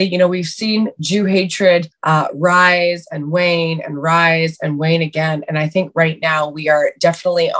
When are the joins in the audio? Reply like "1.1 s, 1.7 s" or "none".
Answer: 1.9 s